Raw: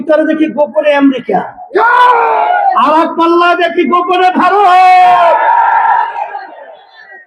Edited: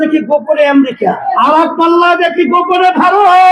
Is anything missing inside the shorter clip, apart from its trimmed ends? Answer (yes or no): yes